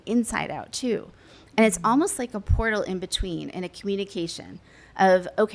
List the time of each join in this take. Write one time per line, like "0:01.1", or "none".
none